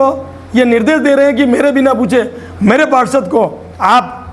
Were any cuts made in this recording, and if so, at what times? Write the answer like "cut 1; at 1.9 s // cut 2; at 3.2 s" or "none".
none